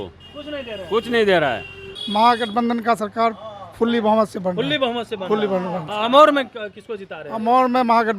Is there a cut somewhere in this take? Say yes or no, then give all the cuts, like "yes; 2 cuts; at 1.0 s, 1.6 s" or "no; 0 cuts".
yes; 1 cut; at 2.0 s